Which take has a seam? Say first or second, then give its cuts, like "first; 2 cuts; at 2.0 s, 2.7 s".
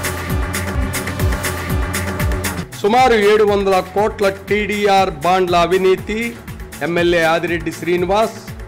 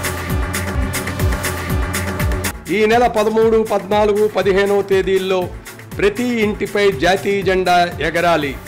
first; 1 cut; at 2.5 s